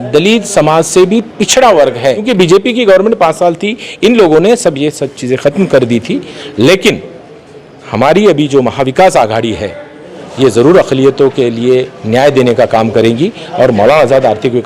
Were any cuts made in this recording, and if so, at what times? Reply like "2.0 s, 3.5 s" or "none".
2.2 s

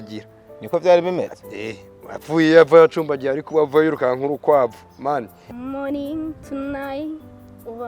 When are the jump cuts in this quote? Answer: 5.4 s

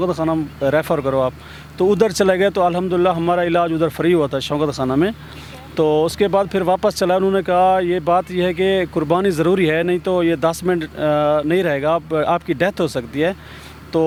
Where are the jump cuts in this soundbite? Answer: none

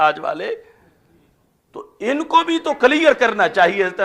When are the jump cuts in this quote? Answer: none

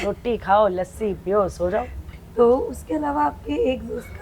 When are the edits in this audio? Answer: 2.2 s

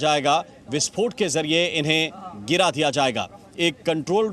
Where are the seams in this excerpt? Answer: none

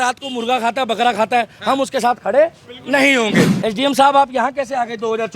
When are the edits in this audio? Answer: 3.5 s

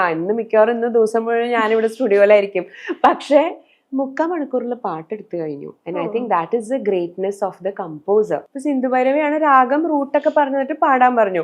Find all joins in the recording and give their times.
8.5 s

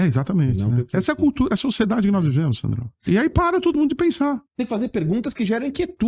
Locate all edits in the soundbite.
2.9 s, 4.5 s

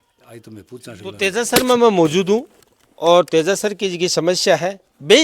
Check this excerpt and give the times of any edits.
1.2 s

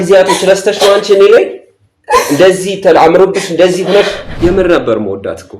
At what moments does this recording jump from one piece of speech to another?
4.2 s

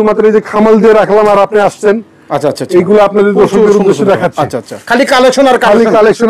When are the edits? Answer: 4.8 s

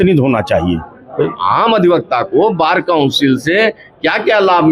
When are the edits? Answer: 1.3 s

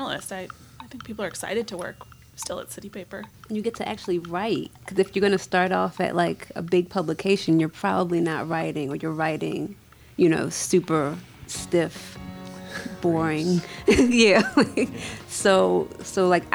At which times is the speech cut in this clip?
3.3 s

